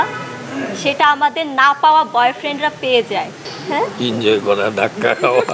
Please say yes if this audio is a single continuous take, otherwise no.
no